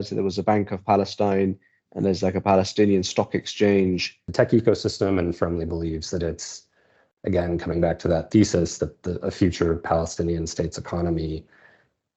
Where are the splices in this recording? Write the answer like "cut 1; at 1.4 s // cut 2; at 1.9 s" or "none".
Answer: cut 1; at 4.2 s